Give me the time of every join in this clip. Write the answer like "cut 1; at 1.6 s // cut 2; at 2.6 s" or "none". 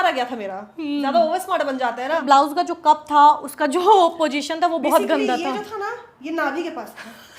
cut 1; at 2.2 s